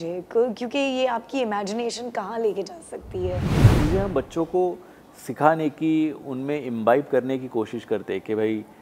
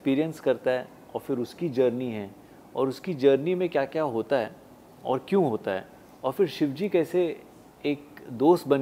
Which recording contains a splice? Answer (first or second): first